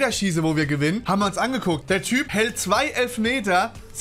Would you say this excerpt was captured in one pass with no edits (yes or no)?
no